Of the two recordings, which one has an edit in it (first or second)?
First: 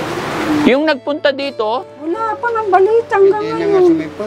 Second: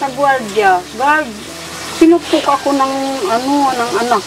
first